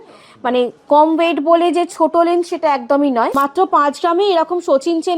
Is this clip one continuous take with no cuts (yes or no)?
no